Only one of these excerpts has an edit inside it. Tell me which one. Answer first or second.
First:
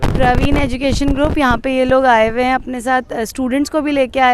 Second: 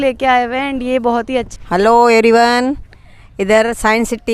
second